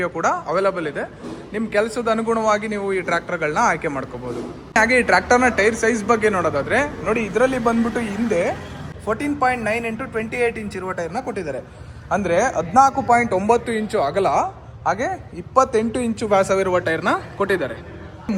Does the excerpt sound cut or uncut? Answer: uncut